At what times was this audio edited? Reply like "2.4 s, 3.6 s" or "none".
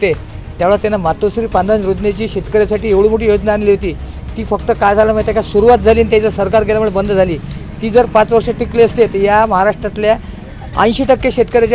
none